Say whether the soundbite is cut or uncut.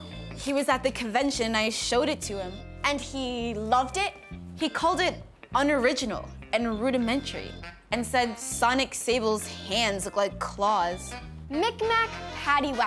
uncut